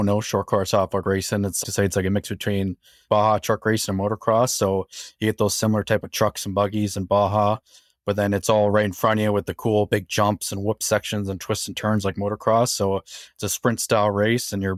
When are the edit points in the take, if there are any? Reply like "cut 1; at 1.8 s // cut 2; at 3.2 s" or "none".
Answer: none